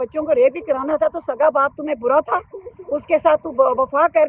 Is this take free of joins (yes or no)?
yes